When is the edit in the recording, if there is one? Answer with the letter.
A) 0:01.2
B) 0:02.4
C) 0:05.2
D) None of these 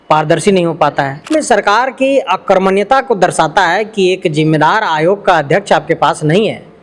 A